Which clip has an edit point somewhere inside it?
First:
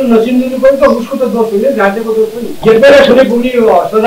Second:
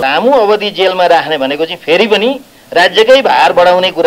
first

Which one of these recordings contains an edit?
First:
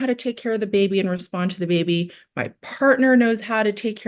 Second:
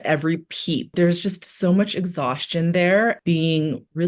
second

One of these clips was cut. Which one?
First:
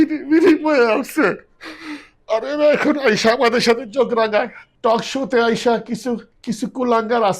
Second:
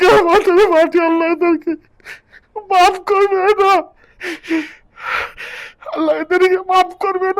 first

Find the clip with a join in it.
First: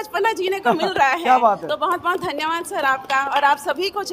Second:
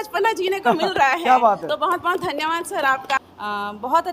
second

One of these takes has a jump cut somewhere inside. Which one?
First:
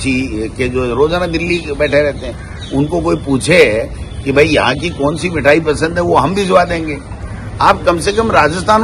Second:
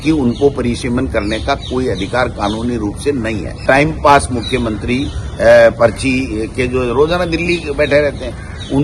second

